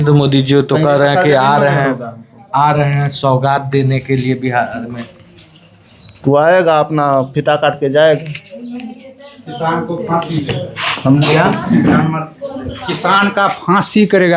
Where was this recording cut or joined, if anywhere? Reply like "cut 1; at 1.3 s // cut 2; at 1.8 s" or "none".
none